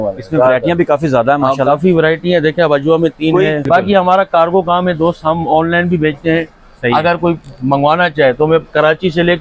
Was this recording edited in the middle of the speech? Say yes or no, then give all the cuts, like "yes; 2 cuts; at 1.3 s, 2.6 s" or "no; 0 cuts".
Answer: no; 0 cuts